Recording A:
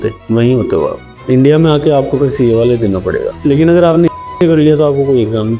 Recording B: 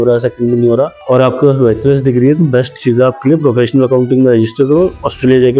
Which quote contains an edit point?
B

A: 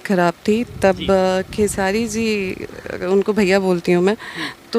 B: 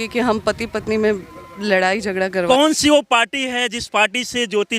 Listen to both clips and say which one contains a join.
B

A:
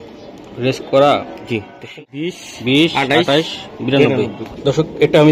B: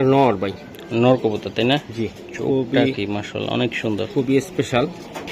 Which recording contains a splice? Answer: A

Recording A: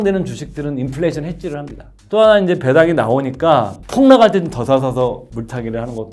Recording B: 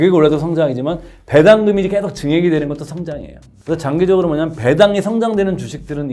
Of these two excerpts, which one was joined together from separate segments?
A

